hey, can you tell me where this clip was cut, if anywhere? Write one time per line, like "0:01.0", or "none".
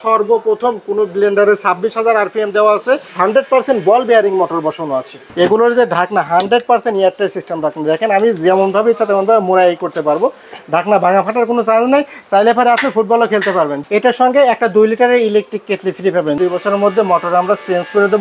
0:03.1
0:05.2
0:13.8
0:16.4